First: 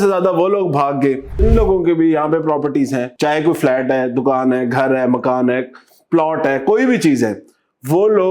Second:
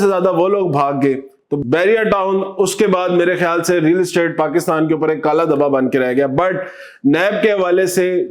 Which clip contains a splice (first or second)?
first